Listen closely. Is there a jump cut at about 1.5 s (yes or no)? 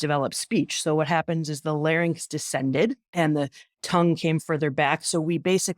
no